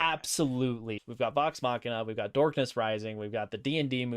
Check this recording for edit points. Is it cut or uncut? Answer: cut